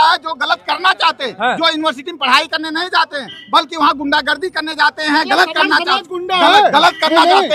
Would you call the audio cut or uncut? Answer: uncut